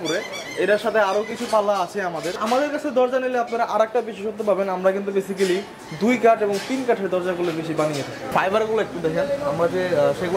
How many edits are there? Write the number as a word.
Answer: two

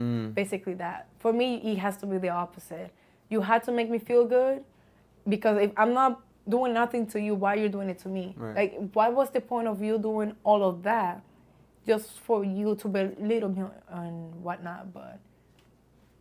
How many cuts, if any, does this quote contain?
zero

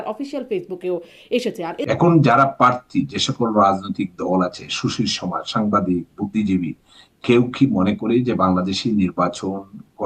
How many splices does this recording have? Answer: one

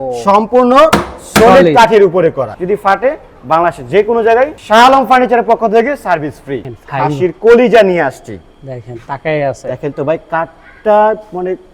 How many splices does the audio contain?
two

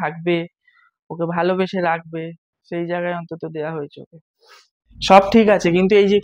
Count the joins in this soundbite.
one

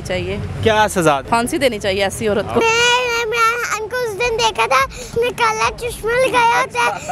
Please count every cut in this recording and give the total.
three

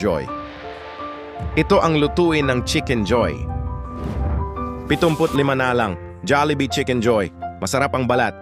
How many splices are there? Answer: zero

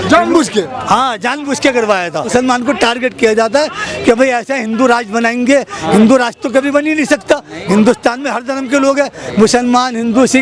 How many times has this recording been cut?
one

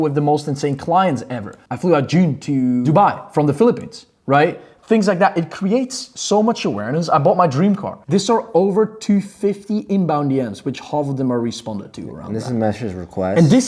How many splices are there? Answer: one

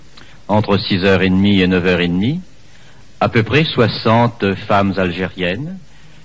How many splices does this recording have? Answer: zero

